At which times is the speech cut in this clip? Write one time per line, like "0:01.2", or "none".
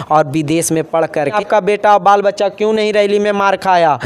0:01.3